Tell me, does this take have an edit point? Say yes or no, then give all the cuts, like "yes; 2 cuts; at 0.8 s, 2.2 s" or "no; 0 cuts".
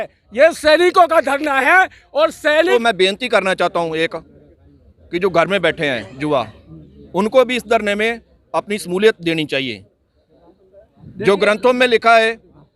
yes; 1 cut; at 2.7 s